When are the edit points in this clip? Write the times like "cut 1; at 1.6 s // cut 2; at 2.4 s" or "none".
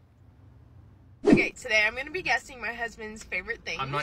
cut 1; at 1.2 s